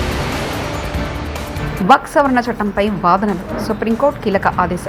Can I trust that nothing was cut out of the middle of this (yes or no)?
yes